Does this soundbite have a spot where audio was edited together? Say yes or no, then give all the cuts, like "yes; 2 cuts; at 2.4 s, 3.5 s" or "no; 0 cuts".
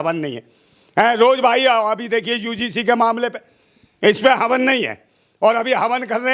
no; 0 cuts